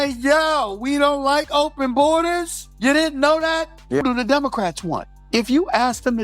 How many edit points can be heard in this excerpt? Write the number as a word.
one